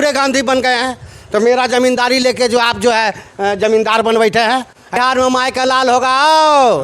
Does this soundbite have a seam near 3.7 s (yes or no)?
no